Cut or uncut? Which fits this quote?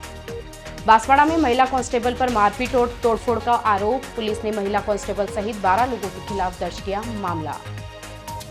uncut